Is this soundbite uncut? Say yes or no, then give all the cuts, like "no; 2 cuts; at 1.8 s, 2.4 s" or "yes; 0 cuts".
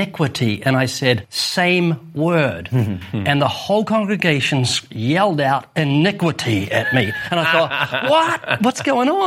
no; 1 cut; at 1.4 s